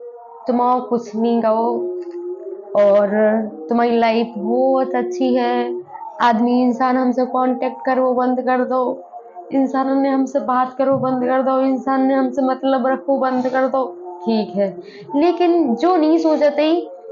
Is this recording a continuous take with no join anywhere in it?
yes; 0 cuts

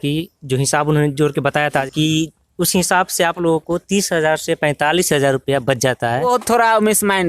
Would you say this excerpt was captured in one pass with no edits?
no; 2 cuts; at 1.8 s, 6.3 s

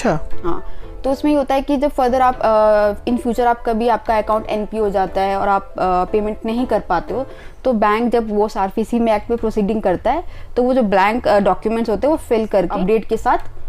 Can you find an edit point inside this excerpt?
yes; 1 cut; at 12.7 s

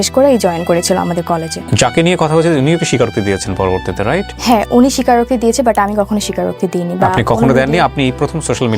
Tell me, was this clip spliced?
yes; 2 cuts; at 1.6 s, 4.3 s

